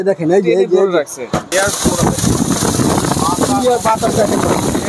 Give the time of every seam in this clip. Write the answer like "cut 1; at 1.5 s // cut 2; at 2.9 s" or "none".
cut 1; at 1.5 s

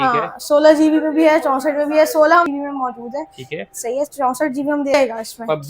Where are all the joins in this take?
cut 1; at 2.5 s // cut 2; at 4.9 s

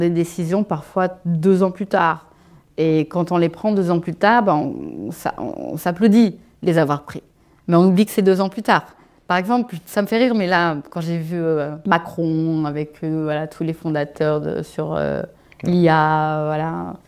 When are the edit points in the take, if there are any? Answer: cut 1; at 11.8 s

